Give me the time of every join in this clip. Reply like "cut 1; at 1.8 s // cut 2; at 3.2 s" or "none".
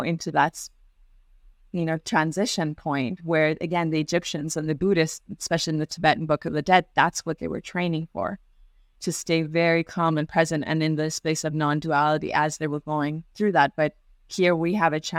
none